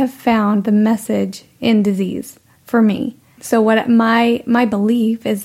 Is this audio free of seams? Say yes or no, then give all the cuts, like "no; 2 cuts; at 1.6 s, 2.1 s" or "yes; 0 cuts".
no; 1 cut; at 3.4 s